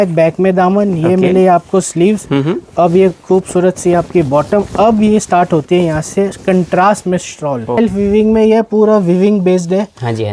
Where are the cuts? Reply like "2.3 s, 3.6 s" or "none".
7.8 s